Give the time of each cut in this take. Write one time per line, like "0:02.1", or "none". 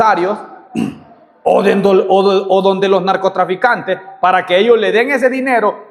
none